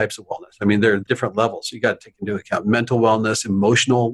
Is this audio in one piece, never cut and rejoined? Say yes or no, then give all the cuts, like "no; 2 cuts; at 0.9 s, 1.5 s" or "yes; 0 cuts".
no; 1 cut; at 1.0 s